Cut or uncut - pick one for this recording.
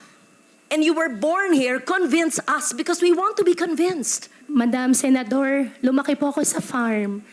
cut